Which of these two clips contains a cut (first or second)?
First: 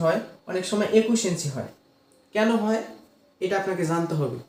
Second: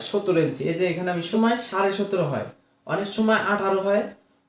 second